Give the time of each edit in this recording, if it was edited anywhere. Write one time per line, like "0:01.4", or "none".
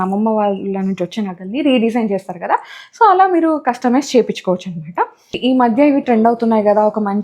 0:05.4

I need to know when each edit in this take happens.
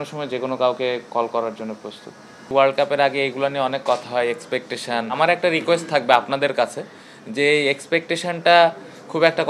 0:02.4
0:05.2

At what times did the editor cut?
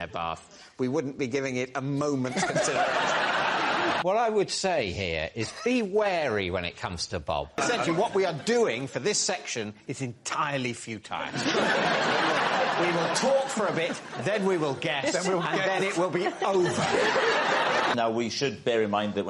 0:04.0
0:07.6
0:17.9

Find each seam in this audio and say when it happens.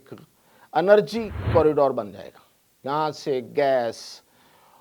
0:01.4

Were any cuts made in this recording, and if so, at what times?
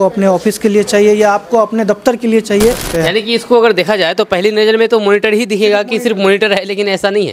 0:02.9

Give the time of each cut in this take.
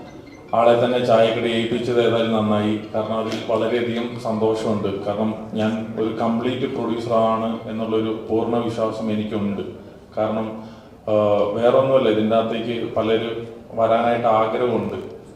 none

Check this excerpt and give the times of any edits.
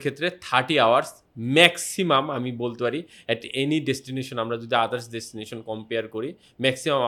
none

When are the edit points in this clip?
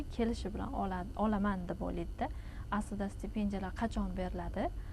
none

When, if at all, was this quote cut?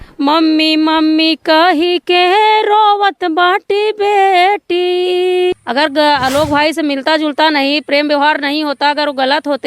0:05.6

